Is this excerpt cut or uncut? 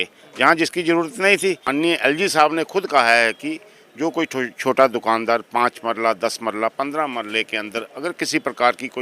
cut